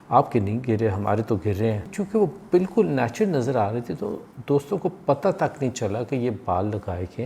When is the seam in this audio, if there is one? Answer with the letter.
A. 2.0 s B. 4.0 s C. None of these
A